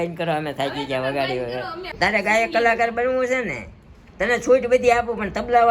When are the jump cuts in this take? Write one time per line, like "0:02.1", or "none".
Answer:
0:01.9